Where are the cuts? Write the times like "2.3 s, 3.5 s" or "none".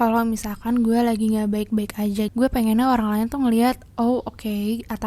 none